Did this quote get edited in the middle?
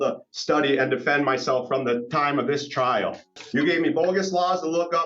yes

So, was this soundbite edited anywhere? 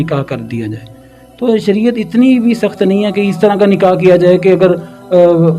no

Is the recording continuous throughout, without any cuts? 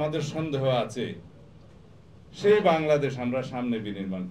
yes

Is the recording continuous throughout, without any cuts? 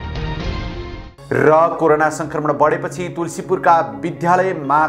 yes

